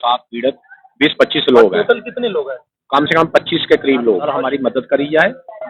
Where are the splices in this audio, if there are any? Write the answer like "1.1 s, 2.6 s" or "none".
4.3 s